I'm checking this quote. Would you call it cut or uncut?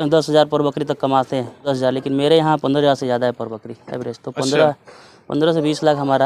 cut